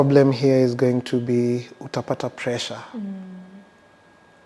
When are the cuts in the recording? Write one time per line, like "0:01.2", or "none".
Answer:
none